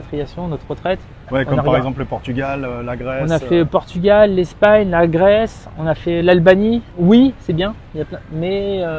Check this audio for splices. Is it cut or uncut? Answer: uncut